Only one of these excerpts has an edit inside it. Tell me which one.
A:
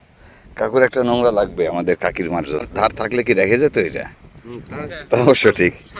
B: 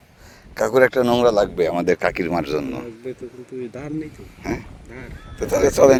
A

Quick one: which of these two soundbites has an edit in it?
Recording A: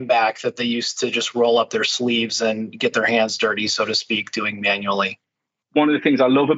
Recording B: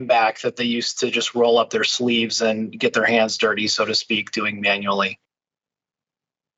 A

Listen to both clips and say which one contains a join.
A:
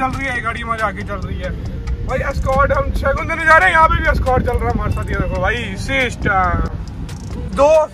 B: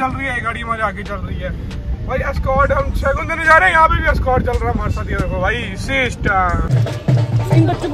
B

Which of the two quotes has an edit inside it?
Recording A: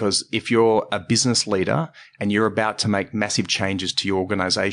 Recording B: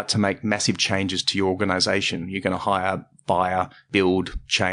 B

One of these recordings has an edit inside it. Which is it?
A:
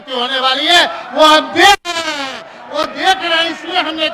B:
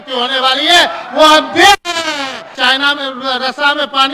B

